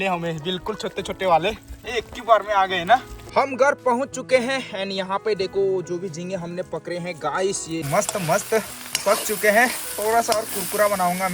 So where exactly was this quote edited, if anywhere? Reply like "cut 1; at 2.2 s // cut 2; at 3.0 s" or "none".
cut 1; at 3.2 s // cut 2; at 7.9 s